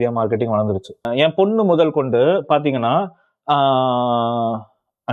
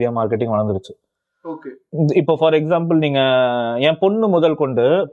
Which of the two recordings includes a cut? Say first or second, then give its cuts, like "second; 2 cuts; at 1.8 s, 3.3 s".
first; 1 cut; at 1.1 s